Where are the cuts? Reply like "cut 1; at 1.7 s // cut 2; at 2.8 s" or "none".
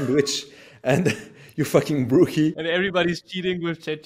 cut 1; at 2.8 s